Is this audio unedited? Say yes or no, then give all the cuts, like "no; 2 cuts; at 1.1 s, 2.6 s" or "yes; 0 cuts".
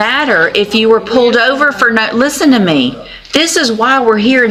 yes; 0 cuts